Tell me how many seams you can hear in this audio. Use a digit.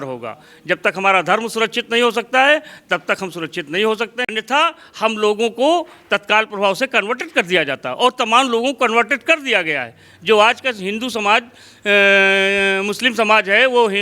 1